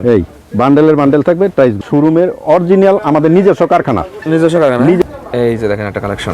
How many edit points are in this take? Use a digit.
2